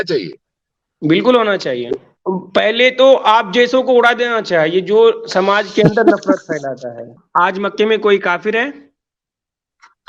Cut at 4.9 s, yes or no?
no